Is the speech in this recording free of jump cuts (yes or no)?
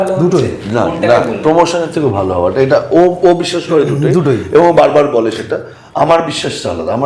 yes